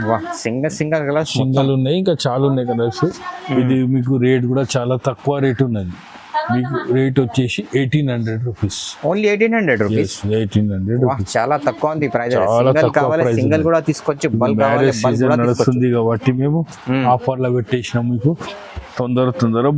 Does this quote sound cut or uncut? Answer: uncut